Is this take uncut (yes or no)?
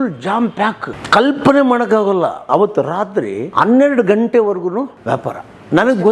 no